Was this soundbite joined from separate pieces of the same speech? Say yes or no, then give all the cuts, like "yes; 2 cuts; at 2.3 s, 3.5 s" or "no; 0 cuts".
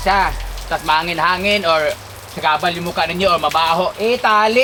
no; 0 cuts